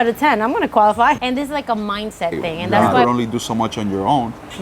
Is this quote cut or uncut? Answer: cut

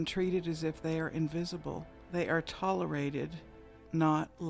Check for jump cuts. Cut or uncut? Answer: cut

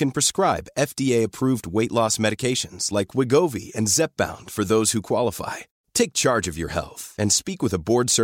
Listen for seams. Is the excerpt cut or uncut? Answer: uncut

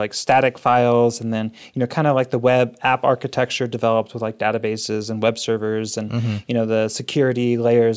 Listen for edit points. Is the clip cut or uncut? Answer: uncut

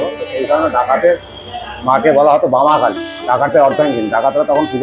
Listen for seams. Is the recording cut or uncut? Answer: cut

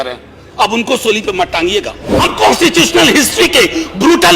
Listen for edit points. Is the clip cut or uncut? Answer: cut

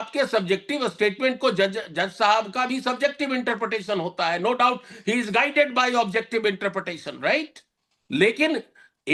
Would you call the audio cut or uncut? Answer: uncut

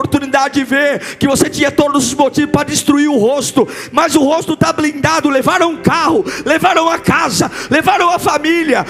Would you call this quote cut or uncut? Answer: uncut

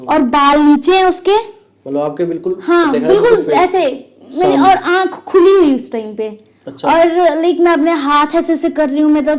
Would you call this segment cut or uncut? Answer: uncut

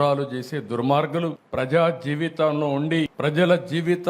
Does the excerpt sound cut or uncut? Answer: cut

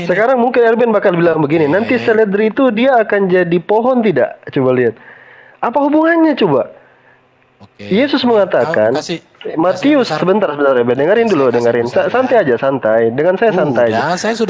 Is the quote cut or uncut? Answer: uncut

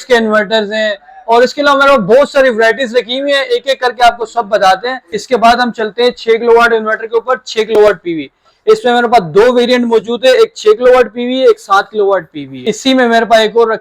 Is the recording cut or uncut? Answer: cut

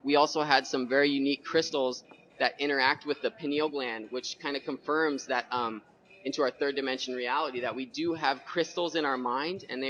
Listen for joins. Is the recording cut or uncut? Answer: cut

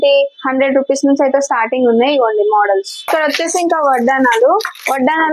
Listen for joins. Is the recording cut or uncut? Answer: cut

